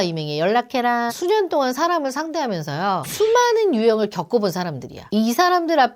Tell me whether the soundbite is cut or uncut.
cut